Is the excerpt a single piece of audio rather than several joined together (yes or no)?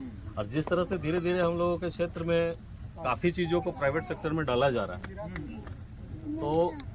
yes